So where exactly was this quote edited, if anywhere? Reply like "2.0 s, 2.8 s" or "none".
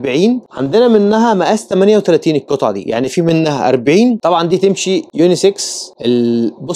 4.2 s